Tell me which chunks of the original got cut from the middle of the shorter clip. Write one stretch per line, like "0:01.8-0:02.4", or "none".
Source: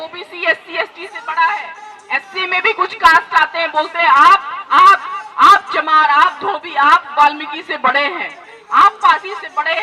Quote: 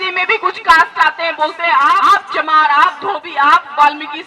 0:04.4-0:05.4